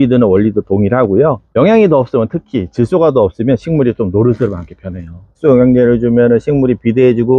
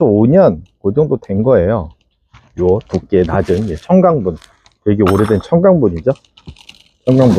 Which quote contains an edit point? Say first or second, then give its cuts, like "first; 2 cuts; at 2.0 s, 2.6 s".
first; 2 cuts; at 1.4 s, 5.3 s